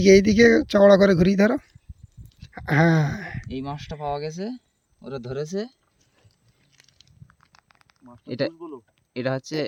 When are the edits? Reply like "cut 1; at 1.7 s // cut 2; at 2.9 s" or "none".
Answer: none